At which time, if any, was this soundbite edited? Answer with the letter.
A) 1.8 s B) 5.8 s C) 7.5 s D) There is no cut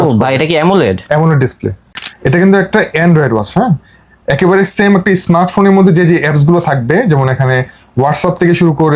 A